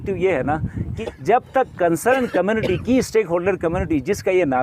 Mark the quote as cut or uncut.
cut